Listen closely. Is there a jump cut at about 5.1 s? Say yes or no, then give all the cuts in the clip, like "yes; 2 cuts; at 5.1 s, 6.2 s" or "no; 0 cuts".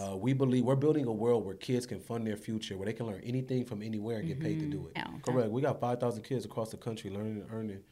yes; 1 cut; at 5.1 s